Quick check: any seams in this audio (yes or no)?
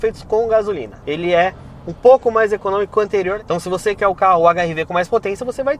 yes